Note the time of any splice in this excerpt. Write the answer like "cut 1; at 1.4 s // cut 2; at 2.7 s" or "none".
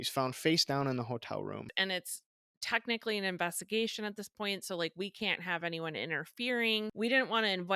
cut 1; at 1.7 s // cut 2; at 6.9 s